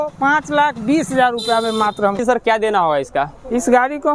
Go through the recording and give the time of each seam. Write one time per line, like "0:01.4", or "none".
0:02.2